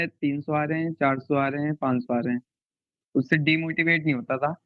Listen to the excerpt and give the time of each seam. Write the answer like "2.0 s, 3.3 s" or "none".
none